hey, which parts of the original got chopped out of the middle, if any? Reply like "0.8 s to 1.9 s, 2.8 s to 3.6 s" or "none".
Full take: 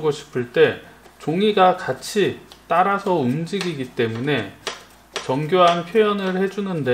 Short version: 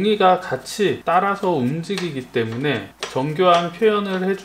2.4 s to 2.6 s, 4.6 s to 5.1 s